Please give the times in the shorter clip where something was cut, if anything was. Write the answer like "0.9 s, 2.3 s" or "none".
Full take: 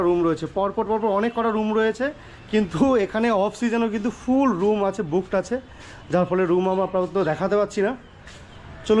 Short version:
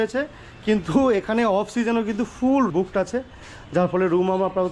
2.7 s

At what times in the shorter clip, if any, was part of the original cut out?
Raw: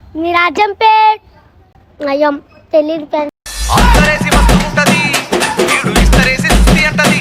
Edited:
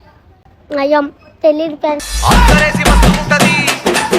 2.1 s

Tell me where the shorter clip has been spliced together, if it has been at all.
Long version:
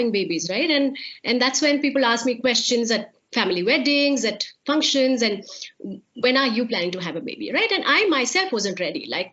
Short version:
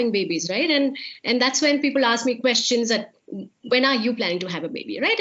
3.2 s

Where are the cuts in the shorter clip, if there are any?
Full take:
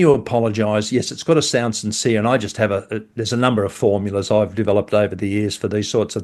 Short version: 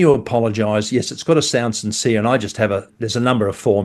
2.9 s

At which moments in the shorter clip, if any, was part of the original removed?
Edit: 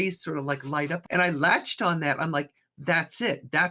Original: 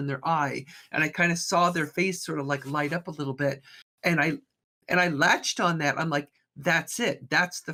1.0 s

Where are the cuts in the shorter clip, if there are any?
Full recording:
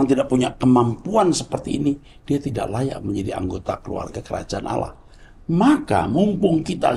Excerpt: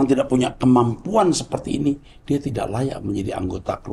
none

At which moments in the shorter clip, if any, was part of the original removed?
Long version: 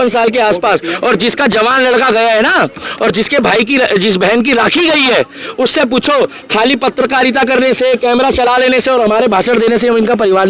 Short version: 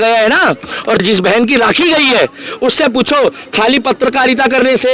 1.0 s

